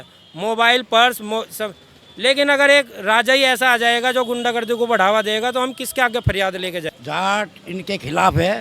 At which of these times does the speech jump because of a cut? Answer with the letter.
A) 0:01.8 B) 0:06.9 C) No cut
B